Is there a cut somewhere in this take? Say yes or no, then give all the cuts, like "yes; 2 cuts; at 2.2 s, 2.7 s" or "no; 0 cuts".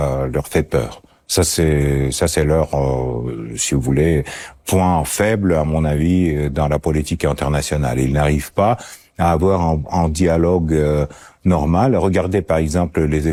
no; 0 cuts